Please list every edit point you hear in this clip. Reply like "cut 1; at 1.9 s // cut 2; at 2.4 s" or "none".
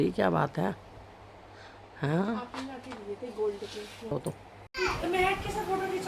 cut 1; at 4.4 s

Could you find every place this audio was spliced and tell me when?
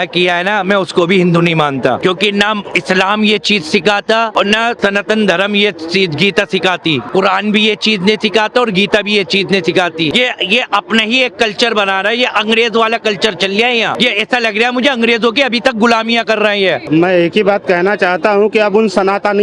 cut 1; at 2.0 s // cut 2; at 4.6 s // cut 3; at 7.0 s // cut 4; at 10.1 s // cut 5; at 13.9 s // cut 6; at 16.8 s

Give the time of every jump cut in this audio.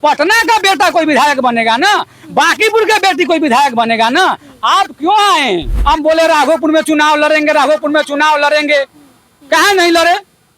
cut 1; at 5.7 s

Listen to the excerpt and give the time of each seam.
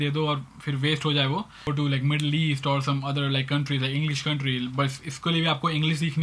cut 1; at 1.7 s

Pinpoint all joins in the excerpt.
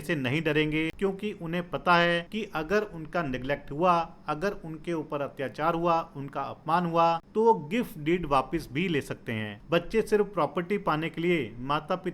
cut 1; at 0.9 s // cut 2; at 2.3 s // cut 3; at 7.2 s // cut 4; at 9.5 s

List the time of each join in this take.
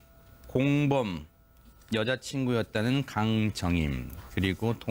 cut 1; at 3.3 s

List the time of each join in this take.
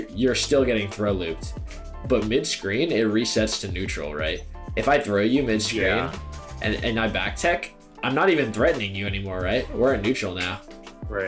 cut 1; at 2.0 s // cut 2; at 4.5 s // cut 3; at 7.9 s

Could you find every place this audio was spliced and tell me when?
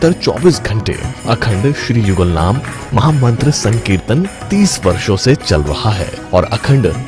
cut 1; at 3.0 s

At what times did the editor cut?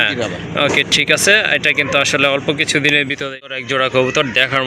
cut 1; at 3.6 s

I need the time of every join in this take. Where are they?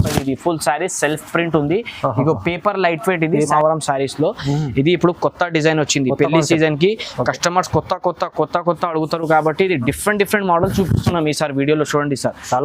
cut 1; at 3.5 s

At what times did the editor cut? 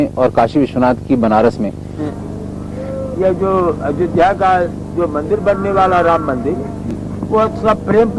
cut 1; at 2.1 s

